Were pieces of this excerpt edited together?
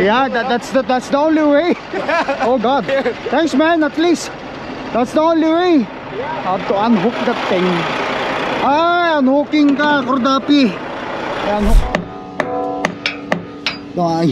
yes; 1 cut; at 11.8 s

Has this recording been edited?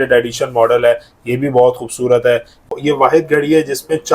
yes; 1 cut; at 2.8 s

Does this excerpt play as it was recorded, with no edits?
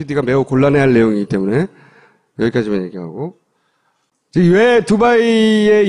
no; 1 cut; at 2.6 s

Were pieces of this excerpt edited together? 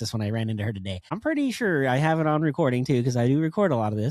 yes; 1 cut; at 1.1 s

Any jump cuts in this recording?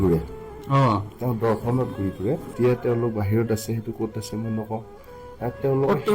yes; 1 cut; at 2.5 s

